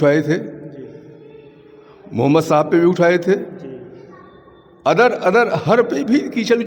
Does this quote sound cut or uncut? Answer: uncut